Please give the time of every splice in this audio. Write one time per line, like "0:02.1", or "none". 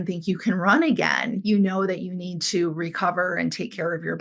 none